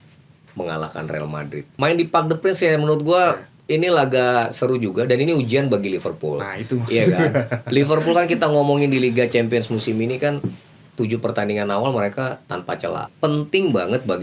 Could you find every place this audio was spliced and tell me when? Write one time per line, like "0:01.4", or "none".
0:01.7
0:13.1